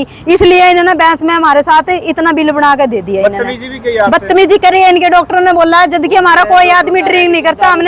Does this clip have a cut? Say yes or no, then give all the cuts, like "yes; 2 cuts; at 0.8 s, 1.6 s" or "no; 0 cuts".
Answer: no; 0 cuts